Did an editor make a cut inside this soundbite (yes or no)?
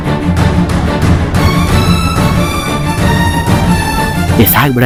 no